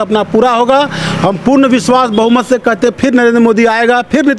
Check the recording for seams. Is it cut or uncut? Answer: uncut